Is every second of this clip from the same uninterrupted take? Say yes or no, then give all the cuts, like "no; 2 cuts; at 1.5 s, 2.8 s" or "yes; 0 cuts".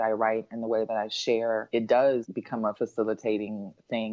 no; 2 cuts; at 1.7 s, 2.6 s